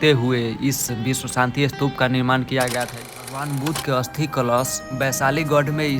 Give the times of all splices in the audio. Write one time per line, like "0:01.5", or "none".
0:03.0